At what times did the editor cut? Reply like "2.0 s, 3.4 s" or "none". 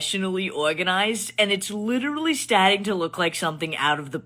none